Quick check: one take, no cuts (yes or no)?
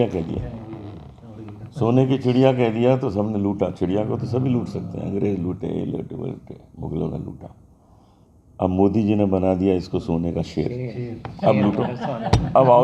yes